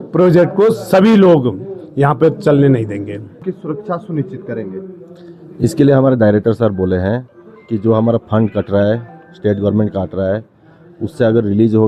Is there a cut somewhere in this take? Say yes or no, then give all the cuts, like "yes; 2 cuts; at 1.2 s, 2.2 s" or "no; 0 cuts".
yes; 1 cut; at 3.4 s